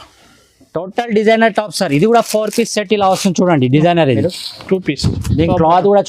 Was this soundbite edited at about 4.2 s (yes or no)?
yes